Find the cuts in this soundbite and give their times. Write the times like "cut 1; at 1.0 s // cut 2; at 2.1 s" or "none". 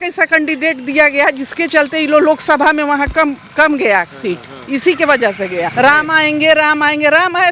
cut 1; at 5.7 s